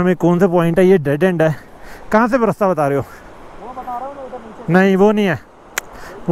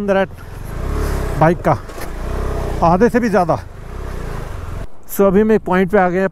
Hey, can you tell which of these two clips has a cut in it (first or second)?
second